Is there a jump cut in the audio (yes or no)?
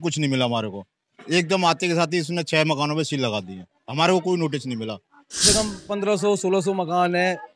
yes